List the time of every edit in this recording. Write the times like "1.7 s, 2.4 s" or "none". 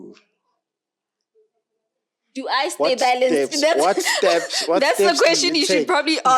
none

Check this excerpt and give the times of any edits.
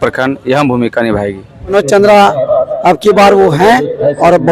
1.7 s

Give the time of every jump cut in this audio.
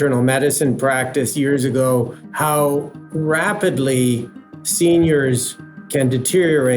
2.2 s, 3.0 s

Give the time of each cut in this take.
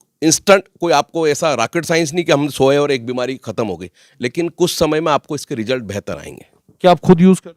none

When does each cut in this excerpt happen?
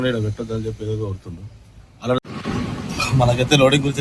2.2 s

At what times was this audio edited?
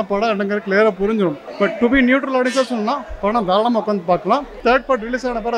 1.4 s, 4.6 s

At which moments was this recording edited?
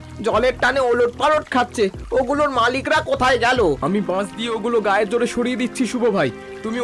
3.8 s

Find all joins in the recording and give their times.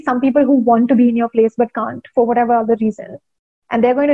none

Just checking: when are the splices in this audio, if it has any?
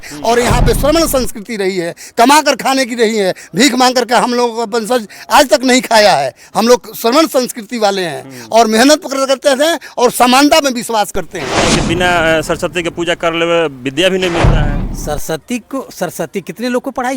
11.7 s

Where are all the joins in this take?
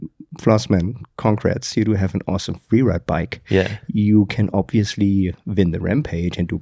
none

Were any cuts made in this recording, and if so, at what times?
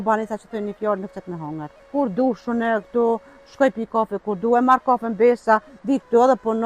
1.8 s

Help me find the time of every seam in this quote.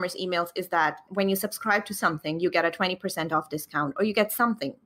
1.0 s

